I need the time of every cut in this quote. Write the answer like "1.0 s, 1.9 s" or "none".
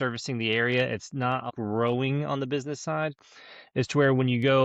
1.5 s